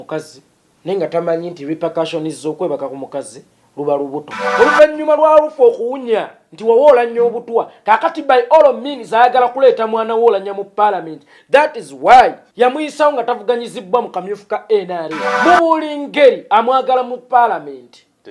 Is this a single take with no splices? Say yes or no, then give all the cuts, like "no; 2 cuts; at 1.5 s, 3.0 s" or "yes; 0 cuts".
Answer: no; 3 cuts; at 4.4 s, 12.4 s, 15.2 s